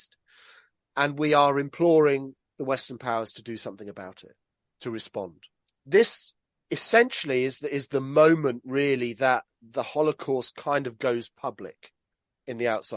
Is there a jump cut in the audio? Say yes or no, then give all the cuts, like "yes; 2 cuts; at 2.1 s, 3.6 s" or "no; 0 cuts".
no; 0 cuts